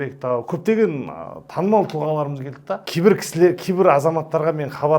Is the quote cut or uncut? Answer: cut